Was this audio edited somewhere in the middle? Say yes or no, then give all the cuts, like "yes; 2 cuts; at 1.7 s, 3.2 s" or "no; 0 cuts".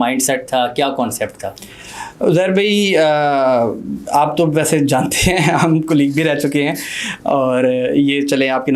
no; 0 cuts